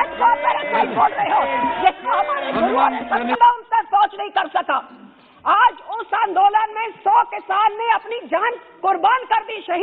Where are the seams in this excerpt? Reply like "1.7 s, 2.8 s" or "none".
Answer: 3.4 s

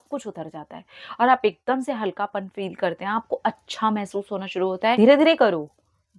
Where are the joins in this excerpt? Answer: 5.0 s

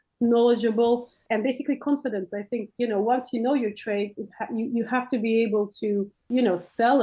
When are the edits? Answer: 1.2 s, 6.2 s

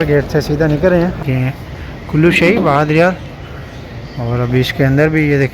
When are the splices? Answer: 1.2 s

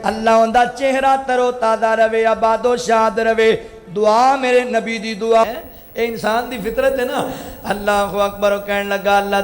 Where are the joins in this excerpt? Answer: 5.4 s

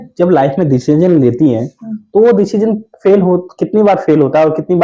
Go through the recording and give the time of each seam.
none

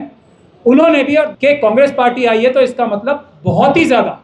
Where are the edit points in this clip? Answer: 1.3 s

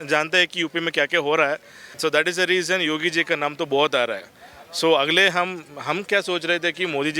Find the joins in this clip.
1.9 s

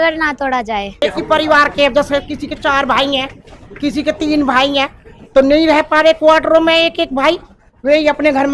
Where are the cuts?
1.0 s

